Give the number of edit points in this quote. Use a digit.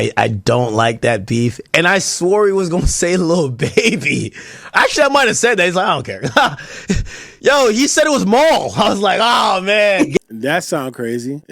1